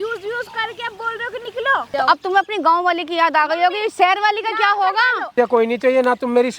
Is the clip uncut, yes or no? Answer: no